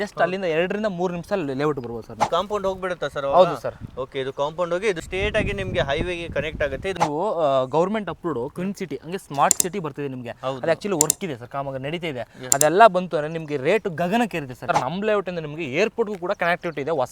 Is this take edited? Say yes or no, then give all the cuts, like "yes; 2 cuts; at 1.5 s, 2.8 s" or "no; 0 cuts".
yes; 4 cuts; at 2.2 s, 5.0 s, 6.9 s, 14.6 s